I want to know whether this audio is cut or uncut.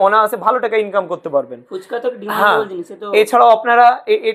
uncut